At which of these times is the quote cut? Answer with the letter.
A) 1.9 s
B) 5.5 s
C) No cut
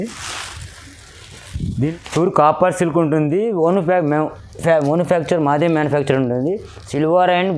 A